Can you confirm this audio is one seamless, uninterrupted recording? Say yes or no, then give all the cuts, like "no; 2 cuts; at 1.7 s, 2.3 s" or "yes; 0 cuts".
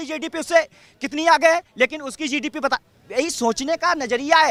yes; 0 cuts